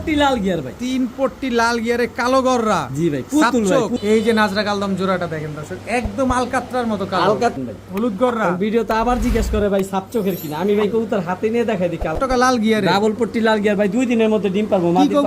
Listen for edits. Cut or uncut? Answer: cut